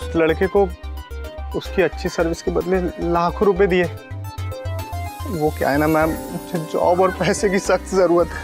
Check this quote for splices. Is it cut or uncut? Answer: uncut